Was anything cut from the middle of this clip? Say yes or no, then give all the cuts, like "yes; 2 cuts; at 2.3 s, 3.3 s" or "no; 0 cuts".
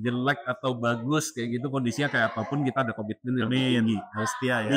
no; 0 cuts